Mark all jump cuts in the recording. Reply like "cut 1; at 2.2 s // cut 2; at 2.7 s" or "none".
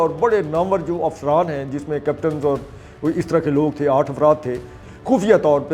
cut 1; at 4.8 s